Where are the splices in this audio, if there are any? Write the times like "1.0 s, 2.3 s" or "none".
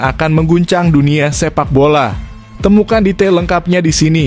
none